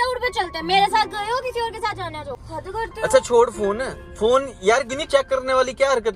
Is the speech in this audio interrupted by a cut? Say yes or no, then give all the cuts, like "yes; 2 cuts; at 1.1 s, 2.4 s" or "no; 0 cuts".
yes; 1 cut; at 2.4 s